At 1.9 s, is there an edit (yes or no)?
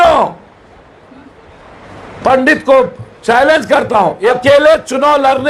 no